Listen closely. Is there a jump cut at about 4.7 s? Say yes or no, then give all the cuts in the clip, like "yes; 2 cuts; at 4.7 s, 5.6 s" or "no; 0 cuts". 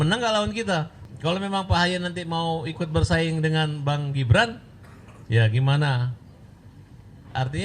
no; 1 cut; at 1.0 s